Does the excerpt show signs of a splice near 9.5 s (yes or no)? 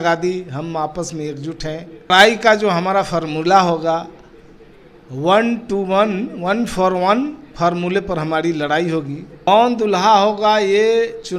yes